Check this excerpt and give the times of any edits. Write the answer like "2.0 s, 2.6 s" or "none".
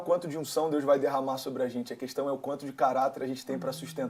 none